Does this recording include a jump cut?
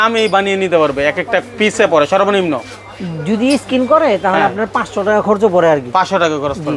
no; 0 cuts

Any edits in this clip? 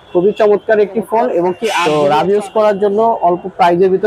yes; 1 cut; at 1.7 s

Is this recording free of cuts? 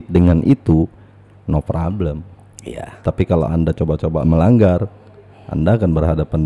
yes; 0 cuts

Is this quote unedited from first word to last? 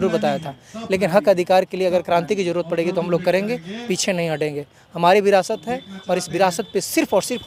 yes; 0 cuts

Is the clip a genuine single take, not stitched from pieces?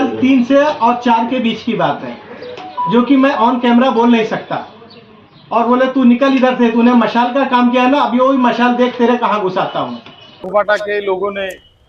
no; 1 cut; at 10.4 s

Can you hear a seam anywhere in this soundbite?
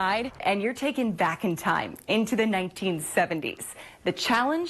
no; 0 cuts

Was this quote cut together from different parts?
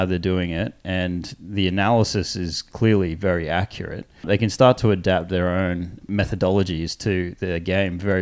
yes; 3 cuts; at 2.6 s, 4.2 s, 6.0 s

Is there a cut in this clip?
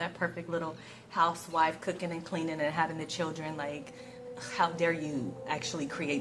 no; 0 cuts

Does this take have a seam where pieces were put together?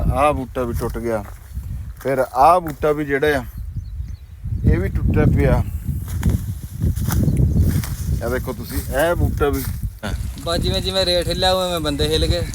yes; 1 cut; at 10.2 s

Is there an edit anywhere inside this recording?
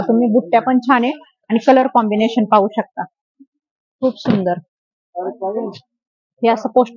no; 0 cuts

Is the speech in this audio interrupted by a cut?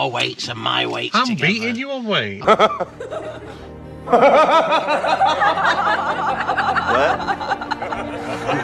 no; 0 cuts

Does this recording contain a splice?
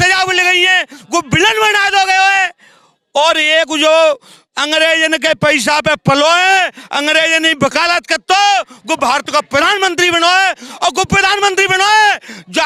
no; 0 cuts

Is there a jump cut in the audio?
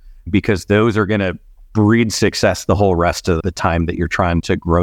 no; 0 cuts

